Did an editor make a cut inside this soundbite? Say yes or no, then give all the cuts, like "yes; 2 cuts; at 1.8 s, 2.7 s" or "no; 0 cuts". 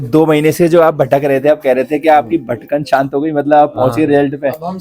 no; 0 cuts